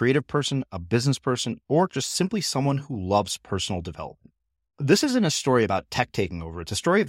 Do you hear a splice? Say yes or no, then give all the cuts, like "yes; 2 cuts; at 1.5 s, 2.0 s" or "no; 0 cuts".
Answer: no; 0 cuts